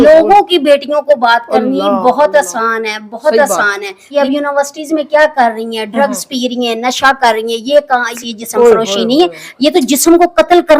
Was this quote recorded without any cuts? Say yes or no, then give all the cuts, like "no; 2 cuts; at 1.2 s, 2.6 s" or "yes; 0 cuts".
no; 2 cuts; at 4.1 s, 8.1 s